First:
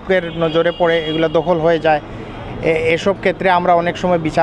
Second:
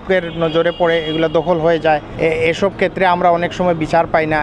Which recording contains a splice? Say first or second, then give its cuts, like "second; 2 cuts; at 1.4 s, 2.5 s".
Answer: second; 1 cut; at 2.1 s